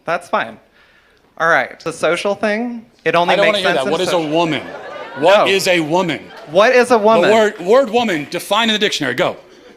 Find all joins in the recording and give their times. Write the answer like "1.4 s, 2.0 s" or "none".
1.9 s